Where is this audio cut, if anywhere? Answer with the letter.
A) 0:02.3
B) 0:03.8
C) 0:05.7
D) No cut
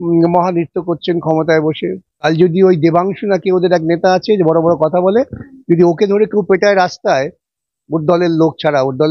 A